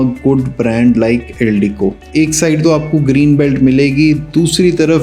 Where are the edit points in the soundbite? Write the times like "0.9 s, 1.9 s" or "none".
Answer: 2.0 s